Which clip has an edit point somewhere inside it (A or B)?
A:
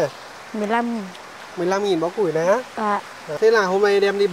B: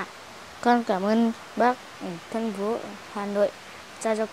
A